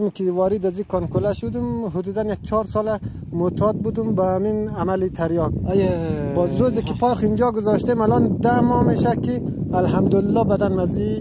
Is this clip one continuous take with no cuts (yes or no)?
yes